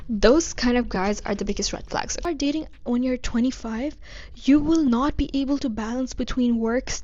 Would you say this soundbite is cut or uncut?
cut